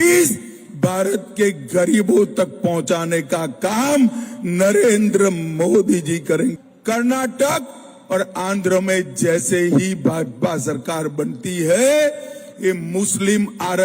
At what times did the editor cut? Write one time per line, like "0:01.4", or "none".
0:06.6

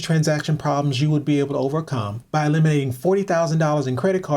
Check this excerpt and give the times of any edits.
0:02.1

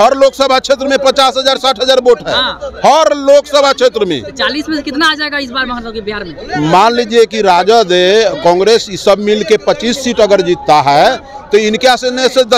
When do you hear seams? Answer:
none

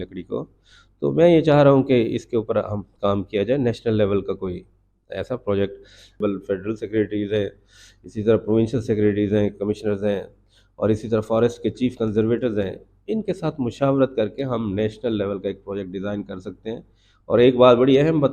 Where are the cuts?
0:06.2

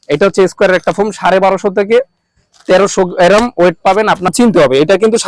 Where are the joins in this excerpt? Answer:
0:04.3

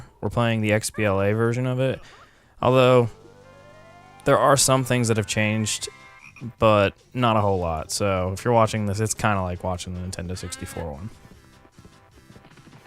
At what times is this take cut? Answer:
0:06.8

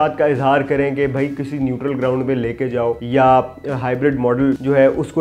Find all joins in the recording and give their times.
none

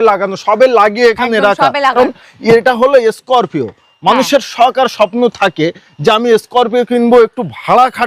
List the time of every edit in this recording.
0:02.0

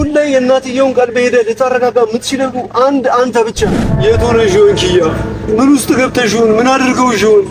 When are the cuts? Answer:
0:03.8

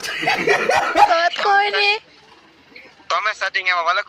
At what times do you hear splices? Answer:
0:01.1

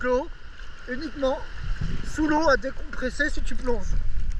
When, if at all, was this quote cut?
none

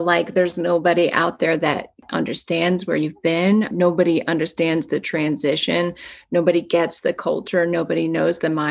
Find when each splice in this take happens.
0:02.0
0:03.7

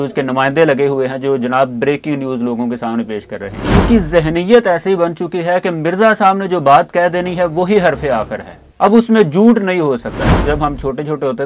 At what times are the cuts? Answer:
0:03.7
0:10.3

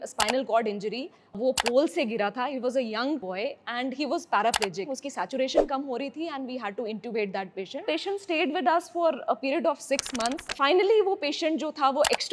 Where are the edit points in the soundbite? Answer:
0:01.4
0:03.2
0:05.0
0:07.8
0:10.5

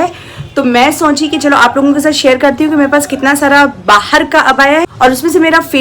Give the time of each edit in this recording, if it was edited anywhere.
0:04.9

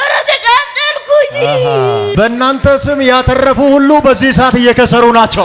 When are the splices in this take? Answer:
0:02.1

